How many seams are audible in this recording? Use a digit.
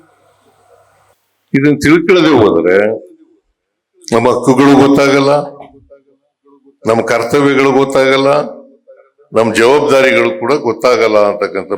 1